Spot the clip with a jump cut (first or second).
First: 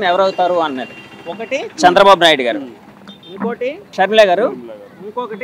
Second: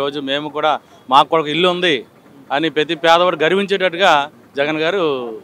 first